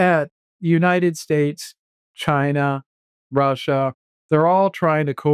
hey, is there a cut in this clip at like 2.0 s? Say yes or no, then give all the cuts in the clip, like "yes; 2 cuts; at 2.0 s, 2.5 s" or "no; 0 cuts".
no; 1 cut; at 4.1 s